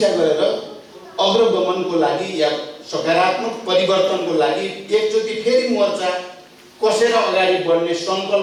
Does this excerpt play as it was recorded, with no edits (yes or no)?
yes